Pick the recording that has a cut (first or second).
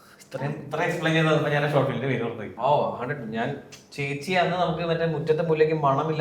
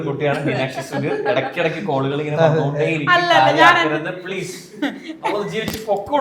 first